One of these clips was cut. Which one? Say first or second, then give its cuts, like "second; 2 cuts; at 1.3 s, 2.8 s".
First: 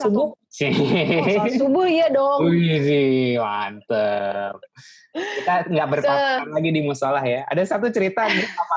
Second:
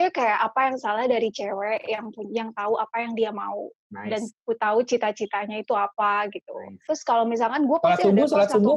second; 1 cut; at 6.8 s